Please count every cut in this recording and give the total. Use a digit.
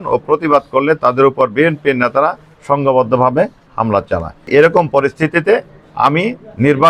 1